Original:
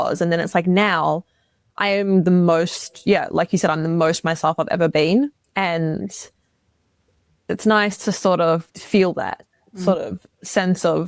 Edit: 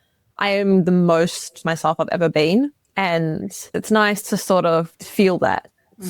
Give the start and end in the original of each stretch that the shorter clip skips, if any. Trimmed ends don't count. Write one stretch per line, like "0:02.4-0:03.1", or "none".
0:03.0-0:04.2
0:06.1-0:07.3